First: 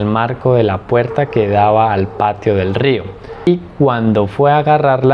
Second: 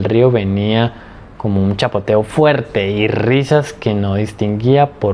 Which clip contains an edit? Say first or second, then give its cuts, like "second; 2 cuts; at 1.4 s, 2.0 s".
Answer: first; 1 cut; at 3.5 s